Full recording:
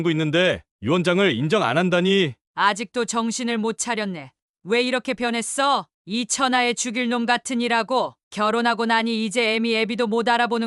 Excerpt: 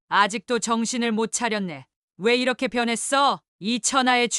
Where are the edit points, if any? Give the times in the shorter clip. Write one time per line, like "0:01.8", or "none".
none